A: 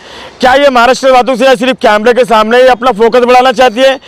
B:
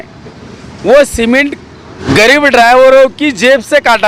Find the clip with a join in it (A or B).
B